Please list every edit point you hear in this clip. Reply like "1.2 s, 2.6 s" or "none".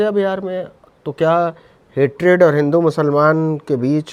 none